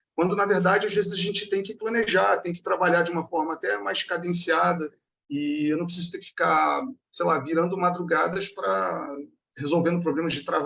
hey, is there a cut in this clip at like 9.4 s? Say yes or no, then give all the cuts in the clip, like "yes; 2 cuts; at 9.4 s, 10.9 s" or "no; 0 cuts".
yes; 1 cut; at 9.4 s